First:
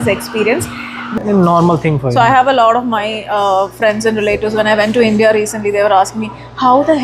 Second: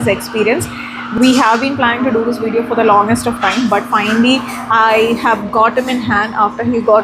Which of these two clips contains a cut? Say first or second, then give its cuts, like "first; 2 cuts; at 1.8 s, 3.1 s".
first; 1 cut; at 1.1 s